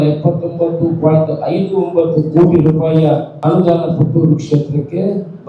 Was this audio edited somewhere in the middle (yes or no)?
yes